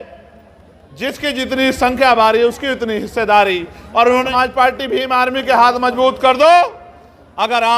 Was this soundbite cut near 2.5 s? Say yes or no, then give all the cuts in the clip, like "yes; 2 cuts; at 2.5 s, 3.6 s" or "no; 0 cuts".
no; 1 cut; at 4.3 s